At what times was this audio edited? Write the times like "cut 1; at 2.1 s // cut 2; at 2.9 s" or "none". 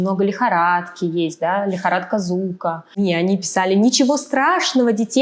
cut 1; at 3.0 s